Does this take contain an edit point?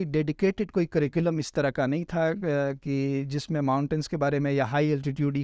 no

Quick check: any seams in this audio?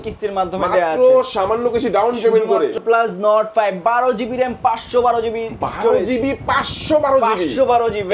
yes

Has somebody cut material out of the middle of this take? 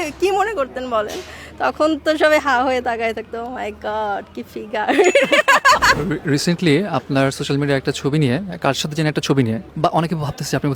yes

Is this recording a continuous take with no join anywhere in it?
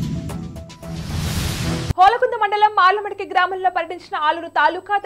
no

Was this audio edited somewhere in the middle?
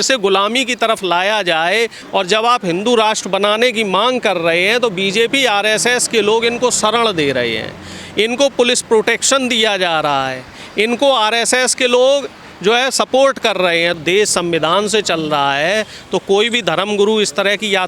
yes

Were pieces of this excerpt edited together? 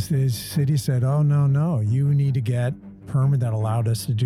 yes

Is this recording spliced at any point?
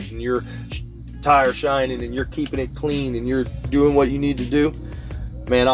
no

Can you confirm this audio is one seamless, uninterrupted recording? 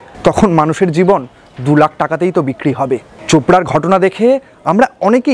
no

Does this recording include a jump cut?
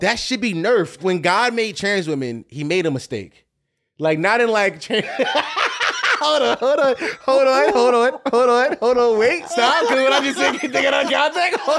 yes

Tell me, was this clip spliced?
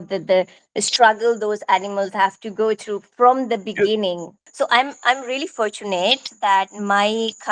yes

